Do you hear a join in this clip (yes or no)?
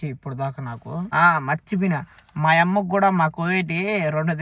yes